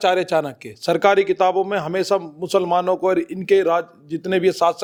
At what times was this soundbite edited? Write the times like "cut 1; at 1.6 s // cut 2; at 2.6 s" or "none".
none